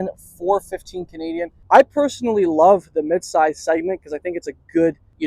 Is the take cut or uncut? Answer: cut